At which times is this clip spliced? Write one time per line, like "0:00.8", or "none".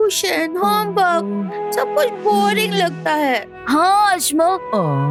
none

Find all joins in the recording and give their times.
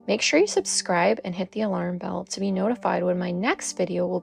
none

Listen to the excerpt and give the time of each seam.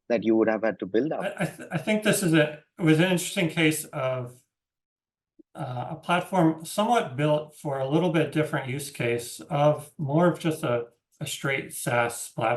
0:01.3

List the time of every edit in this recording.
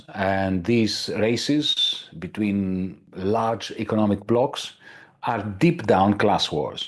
0:03.0

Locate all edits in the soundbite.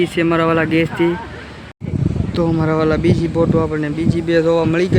0:01.7

